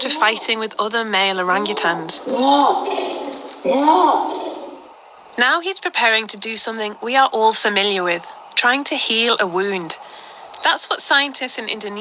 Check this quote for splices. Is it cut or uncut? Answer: uncut